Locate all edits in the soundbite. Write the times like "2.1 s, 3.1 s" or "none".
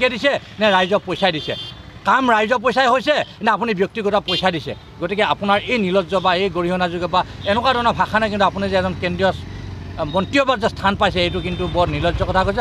none